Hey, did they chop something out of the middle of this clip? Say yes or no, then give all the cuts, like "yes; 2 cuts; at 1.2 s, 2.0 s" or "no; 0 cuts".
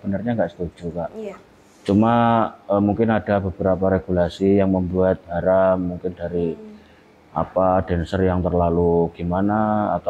no; 0 cuts